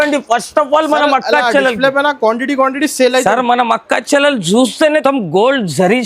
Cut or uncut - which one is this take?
cut